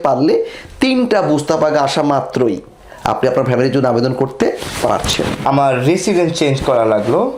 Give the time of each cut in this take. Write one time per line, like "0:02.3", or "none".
0:05.4

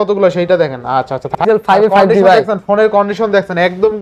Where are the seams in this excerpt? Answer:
0:01.4

